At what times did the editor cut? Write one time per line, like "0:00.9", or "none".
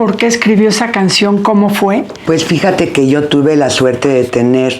none